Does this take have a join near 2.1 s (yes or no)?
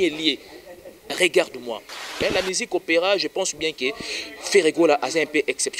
yes